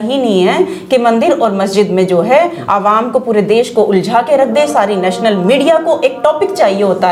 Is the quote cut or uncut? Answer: uncut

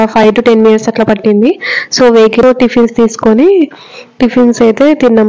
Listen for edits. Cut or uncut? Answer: cut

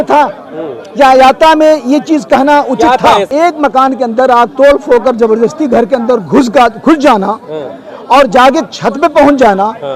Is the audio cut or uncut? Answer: cut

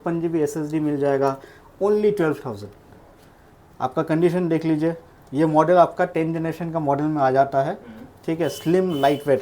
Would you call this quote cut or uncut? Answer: uncut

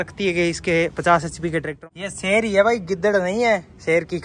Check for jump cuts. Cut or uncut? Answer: cut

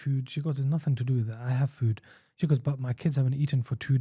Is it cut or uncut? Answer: uncut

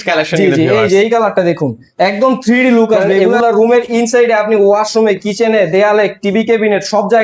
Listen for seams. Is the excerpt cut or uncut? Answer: cut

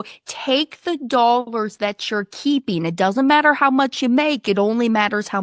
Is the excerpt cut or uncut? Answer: uncut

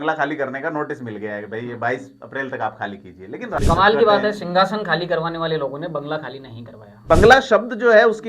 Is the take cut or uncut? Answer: cut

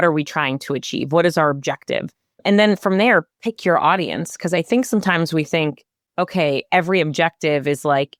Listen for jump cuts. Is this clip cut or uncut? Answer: uncut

